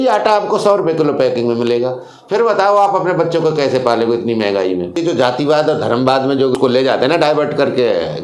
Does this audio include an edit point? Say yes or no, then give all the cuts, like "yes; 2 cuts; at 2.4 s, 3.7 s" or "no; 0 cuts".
yes; 2 cuts; at 5.0 s, 6.5 s